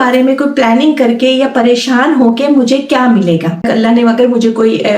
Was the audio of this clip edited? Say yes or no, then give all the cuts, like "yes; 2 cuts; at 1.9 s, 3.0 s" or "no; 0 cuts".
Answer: yes; 1 cut; at 3.6 s